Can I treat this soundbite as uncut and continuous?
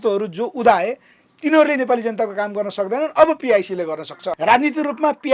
no; 1 cut; at 4.3 s

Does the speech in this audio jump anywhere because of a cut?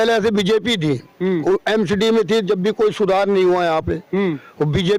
no; 0 cuts

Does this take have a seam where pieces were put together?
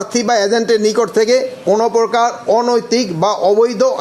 no; 0 cuts

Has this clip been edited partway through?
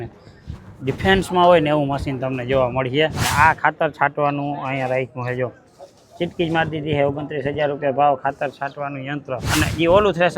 yes; 2 cuts; at 3.2 s, 9.4 s

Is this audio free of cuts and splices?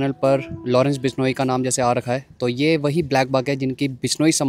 yes; 0 cuts

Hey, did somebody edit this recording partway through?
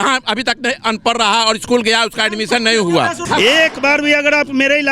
yes; 1 cut; at 3.2 s

